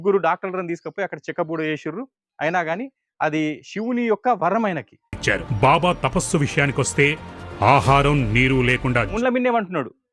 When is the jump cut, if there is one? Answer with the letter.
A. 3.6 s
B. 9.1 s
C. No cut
B